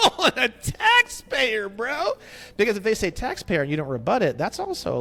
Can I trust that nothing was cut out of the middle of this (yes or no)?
yes